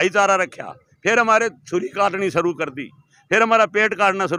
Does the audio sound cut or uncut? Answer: uncut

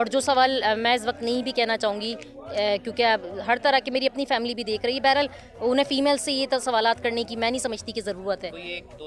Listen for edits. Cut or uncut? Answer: uncut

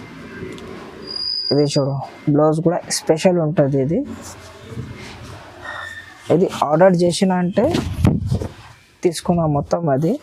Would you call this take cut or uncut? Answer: uncut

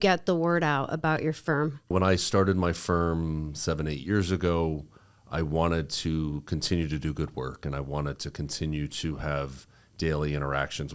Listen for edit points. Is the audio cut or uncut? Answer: cut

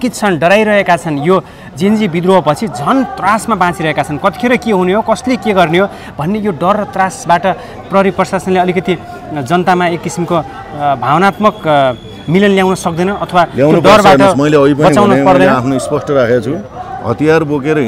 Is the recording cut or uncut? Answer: uncut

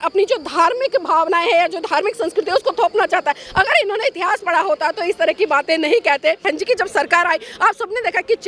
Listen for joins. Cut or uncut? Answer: cut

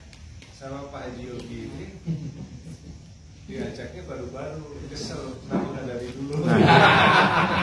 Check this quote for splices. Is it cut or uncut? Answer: uncut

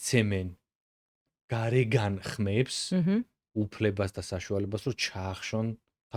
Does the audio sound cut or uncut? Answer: uncut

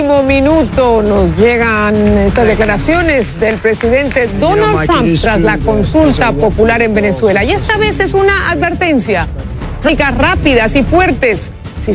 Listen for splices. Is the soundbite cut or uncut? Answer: uncut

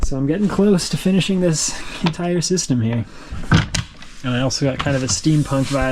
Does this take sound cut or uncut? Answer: cut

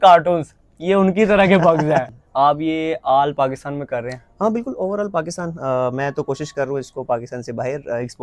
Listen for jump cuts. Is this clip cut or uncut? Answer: cut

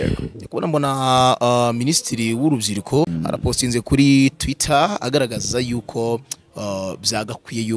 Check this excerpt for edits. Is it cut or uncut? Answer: cut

